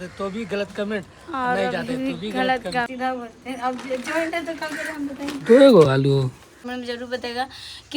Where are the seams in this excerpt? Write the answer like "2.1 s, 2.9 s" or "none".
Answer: 2.9 s, 6.7 s